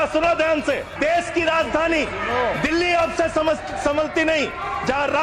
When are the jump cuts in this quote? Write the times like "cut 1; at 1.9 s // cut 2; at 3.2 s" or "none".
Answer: cut 1; at 0.9 s